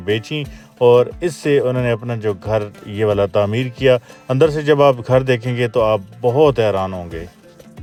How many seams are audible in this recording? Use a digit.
0